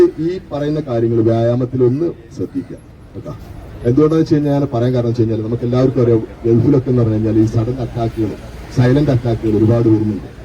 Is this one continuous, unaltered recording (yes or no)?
yes